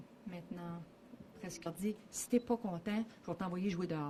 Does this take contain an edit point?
no; 0 cuts

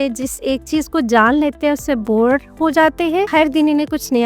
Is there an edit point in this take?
yes; 1 cut; at 3.3 s

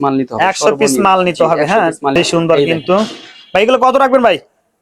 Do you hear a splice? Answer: yes; 1 cut; at 2.1 s

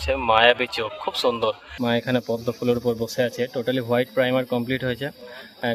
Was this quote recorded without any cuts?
no; 1 cut; at 1.7 s

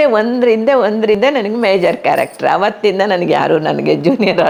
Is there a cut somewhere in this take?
no; 0 cuts

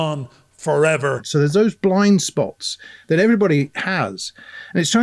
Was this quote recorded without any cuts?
no; 1 cut; at 1.2 s

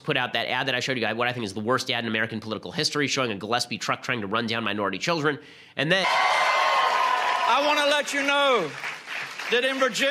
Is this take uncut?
yes; 0 cuts

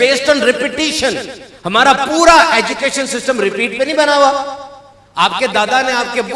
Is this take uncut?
yes; 0 cuts

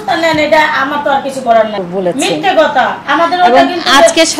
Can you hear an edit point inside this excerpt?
yes; 1 cut; at 1.7 s

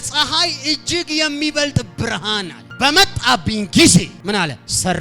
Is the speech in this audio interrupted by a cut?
yes; 2 cuts; at 2.6 s, 4.1 s

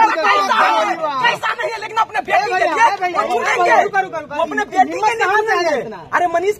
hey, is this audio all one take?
yes; 0 cuts

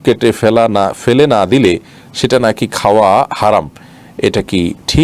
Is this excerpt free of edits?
yes; 0 cuts

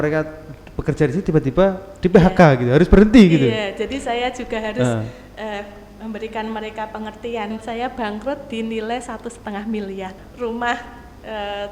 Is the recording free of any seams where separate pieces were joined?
no; 2 cuts; at 7.5 s, 10.2 s

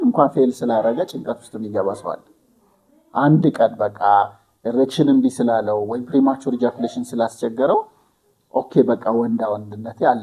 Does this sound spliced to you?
no; 0 cuts

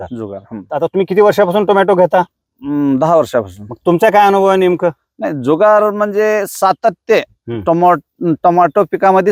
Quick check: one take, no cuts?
yes; 0 cuts

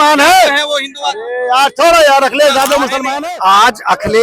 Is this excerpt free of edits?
no; 1 cut; at 3.0 s

